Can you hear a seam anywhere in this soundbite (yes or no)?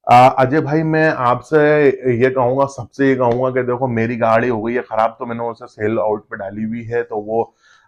no